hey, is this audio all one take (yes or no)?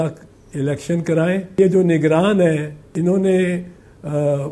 no